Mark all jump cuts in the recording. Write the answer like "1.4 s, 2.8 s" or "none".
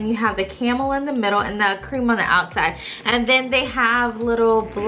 none

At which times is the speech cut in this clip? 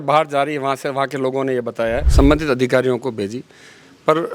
2.1 s

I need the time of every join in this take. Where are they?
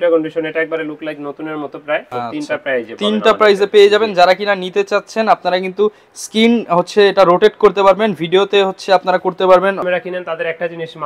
2.1 s, 9.8 s

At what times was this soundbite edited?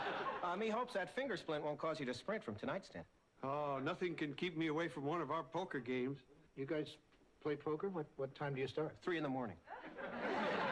2.0 s

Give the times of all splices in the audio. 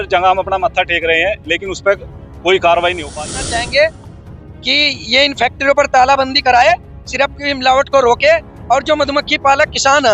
3.3 s

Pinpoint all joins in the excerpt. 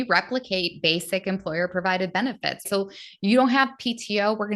2.6 s

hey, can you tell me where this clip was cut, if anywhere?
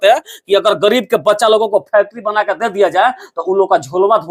none

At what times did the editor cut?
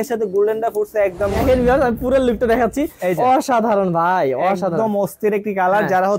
1.4 s

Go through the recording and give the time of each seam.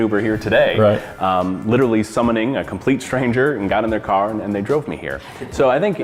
none

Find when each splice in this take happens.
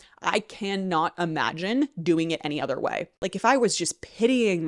3.1 s

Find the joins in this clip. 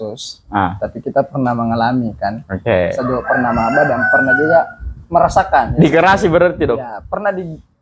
none

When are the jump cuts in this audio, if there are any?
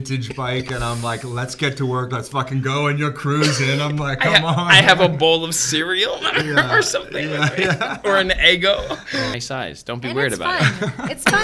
9.4 s

